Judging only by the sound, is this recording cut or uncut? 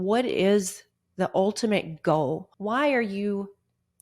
cut